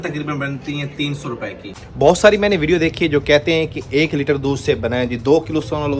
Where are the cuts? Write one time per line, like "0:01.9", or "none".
0:01.8